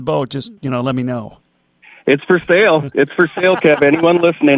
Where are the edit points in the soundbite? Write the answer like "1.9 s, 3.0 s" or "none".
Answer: none